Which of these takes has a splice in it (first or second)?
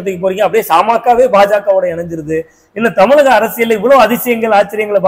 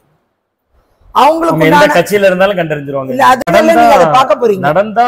second